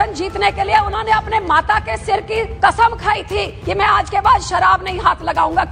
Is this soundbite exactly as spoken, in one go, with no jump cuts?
no; 2 cuts; at 2.5 s, 3.6 s

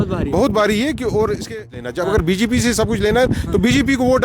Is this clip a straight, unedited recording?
no; 1 cut; at 1.5 s

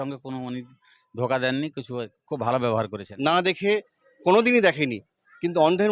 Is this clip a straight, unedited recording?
no; 1 cut; at 3.0 s

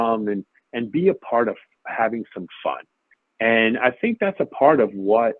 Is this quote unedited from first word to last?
yes; 0 cuts

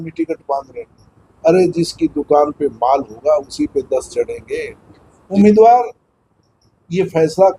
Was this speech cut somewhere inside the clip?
yes; 1 cut; at 5.4 s

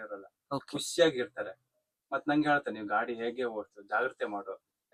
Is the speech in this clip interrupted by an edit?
no; 0 cuts

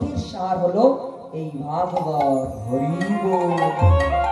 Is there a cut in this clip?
no; 0 cuts

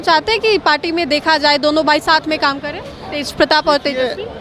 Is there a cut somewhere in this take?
no; 0 cuts

